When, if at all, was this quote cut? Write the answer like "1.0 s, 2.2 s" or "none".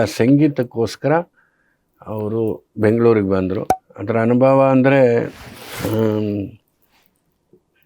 3.7 s